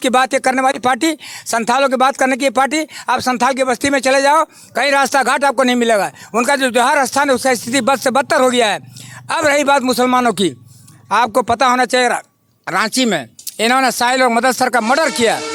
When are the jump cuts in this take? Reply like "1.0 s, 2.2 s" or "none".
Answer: none